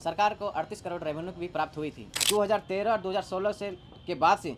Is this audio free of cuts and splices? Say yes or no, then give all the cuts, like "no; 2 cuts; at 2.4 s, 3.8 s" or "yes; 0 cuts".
no; 1 cut; at 2.1 s